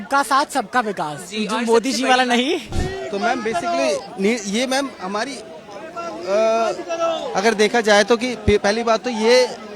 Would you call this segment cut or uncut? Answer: cut